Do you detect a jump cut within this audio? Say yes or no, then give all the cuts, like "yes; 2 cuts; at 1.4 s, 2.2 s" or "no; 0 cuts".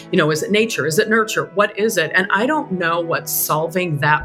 no; 0 cuts